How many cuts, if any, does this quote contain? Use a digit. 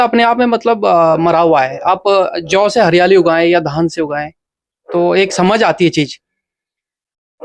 0